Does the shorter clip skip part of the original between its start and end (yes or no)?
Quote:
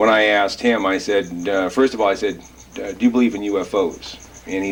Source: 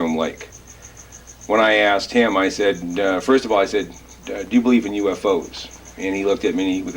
no